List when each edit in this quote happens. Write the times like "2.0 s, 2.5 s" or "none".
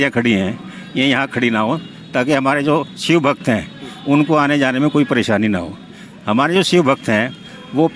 none